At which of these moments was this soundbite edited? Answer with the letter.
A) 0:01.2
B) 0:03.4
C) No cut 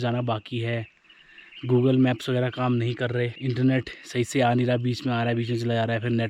B